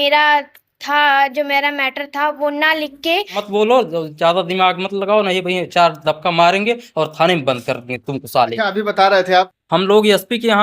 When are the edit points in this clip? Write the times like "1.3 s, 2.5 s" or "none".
3.4 s, 9.5 s